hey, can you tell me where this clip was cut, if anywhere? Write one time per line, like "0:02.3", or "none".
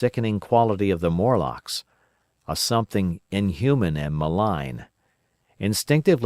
0:04.1

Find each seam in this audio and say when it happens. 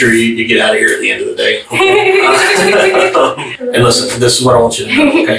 0:03.4

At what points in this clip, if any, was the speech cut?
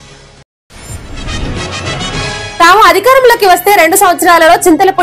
0:02.3

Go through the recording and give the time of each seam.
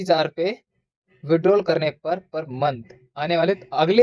none

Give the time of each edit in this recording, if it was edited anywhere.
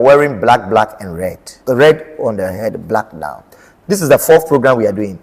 0:01.5
0:03.7

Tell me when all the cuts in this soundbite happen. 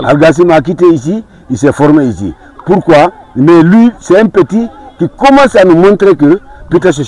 none

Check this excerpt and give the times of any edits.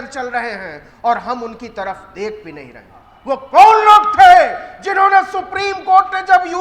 0:03.1

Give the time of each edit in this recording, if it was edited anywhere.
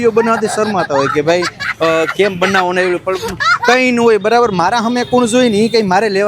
none

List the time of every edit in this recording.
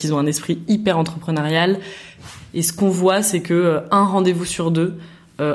0:02.1

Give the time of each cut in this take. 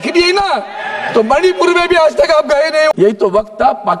0:02.9

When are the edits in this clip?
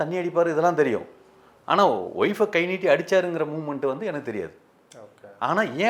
none

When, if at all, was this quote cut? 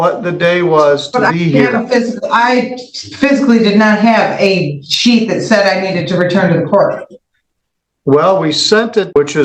none

